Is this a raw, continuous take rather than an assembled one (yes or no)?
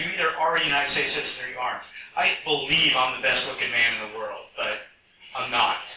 yes